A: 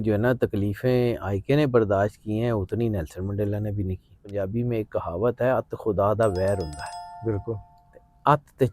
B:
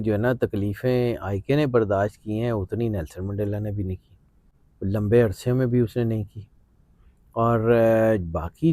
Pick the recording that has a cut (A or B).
A